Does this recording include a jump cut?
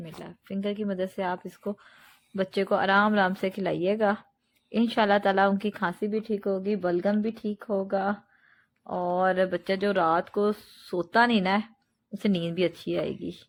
no; 0 cuts

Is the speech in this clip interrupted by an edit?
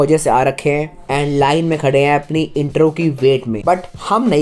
yes; 2 cuts; at 1.0 s, 3.5 s

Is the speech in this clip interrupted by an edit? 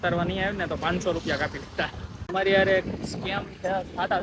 yes; 1 cut; at 2.2 s

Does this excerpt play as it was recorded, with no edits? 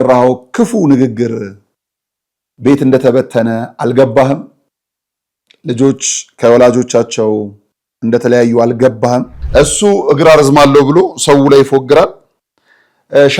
no; 1 cut; at 9.4 s

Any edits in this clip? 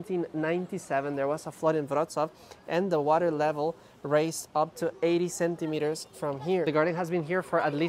no; 0 cuts

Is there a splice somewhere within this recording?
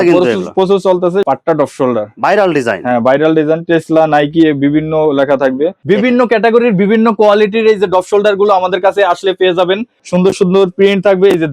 yes; 3 cuts; at 1.2 s, 5.8 s, 10.0 s

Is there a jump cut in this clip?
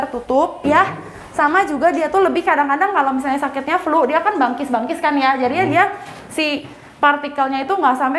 no; 0 cuts

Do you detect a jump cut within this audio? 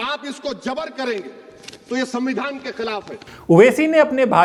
no; 0 cuts

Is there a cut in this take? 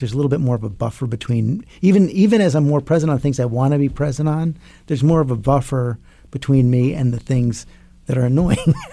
no; 0 cuts

